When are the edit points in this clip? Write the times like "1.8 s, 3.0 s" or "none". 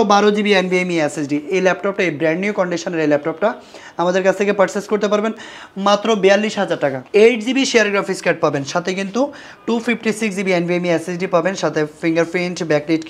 7.0 s